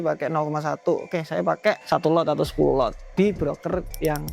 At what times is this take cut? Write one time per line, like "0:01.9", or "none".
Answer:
0:01.8
0:03.0